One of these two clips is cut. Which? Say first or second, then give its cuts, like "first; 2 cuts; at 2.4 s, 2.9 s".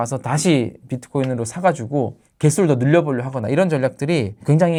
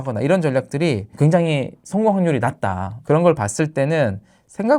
second; 1 cut; at 2.9 s